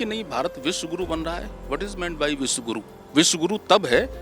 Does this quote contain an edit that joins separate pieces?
yes; 1 cut; at 2.9 s

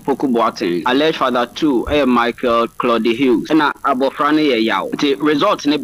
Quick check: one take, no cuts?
no; 3 cuts; at 0.8 s, 3.4 s, 4.9 s

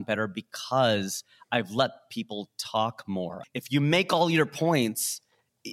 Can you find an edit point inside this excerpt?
yes; 1 cut; at 3.4 s

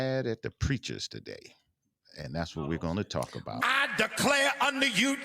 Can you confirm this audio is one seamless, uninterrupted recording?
no; 1 cut; at 3.6 s

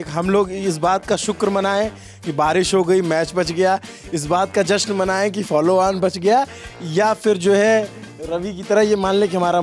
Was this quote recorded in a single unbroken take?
yes; 0 cuts

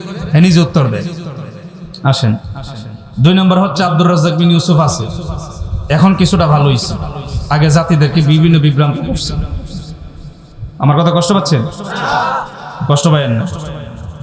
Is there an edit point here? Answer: no; 0 cuts

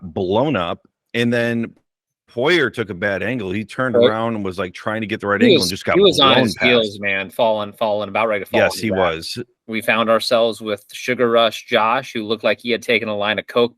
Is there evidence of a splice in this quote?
yes; 1 cut; at 9.6 s

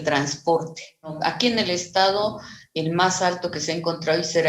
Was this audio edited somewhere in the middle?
yes; 1 cut; at 1.1 s

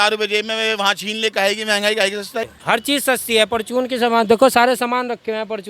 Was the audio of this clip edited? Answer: yes; 1 cut; at 2.5 s

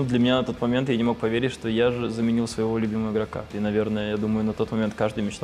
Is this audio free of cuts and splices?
no; 1 cut; at 3.5 s

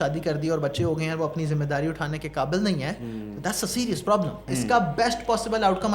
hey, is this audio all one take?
no; 1 cut; at 4.4 s

